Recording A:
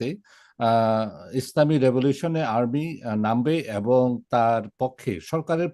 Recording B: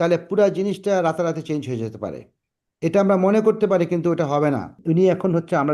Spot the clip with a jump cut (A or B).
B